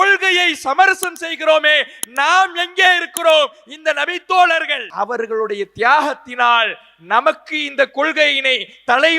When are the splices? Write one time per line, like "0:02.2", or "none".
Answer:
0:04.8